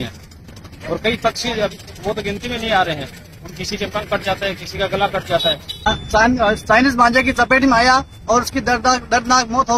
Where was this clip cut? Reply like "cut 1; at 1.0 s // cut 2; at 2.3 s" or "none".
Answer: cut 1; at 5.9 s